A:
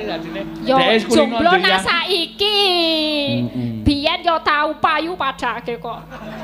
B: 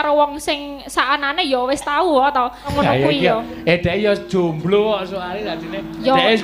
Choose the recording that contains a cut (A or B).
B